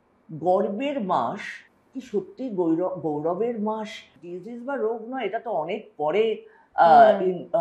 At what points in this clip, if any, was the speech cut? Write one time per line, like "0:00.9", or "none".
0:04.2